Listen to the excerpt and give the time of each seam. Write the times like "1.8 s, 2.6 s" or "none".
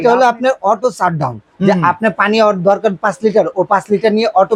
none